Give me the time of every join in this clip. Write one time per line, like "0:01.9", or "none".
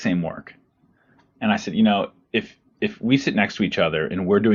none